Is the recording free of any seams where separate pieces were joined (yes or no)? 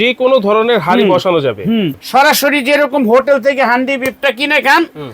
no